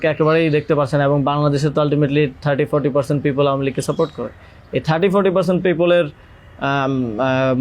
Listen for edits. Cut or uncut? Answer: uncut